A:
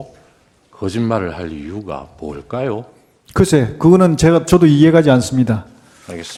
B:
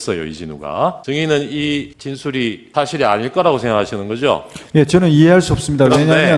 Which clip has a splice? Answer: B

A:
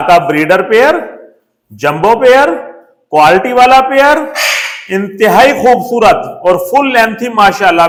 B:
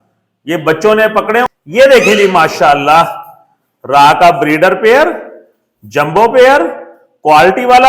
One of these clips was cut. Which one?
B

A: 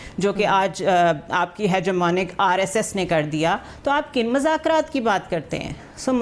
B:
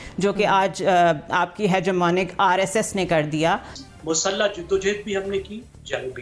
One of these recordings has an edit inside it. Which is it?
B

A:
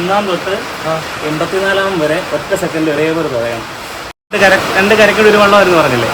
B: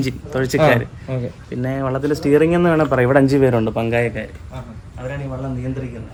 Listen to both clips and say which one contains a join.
A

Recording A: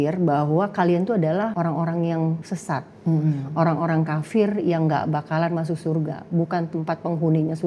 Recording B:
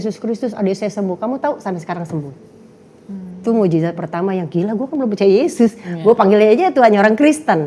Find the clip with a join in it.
A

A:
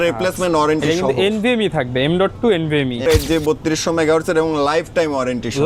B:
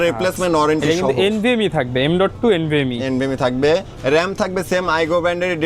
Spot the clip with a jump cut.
A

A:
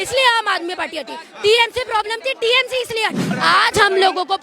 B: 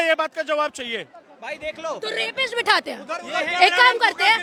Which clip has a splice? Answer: A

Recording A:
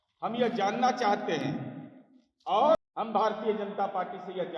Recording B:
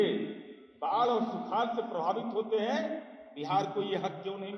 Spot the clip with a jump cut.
A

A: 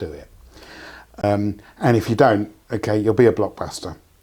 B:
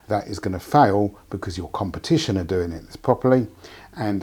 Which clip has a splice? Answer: A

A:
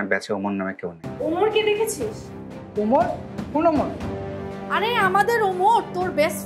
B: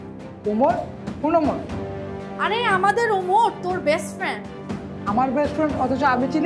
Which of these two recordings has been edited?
A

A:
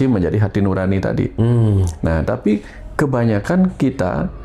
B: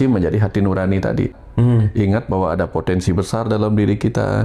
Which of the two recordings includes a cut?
B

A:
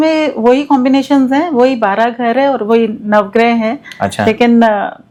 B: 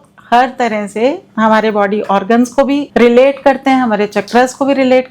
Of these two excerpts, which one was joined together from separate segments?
B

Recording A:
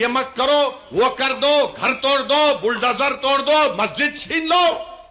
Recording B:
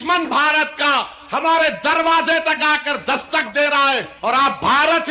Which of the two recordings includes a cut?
B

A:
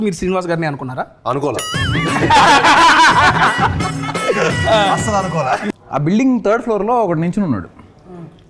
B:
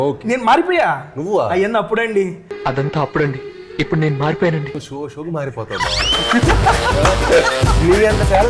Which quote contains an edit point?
A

